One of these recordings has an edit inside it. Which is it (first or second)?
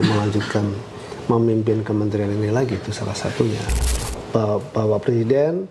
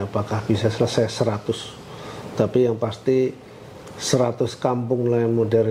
first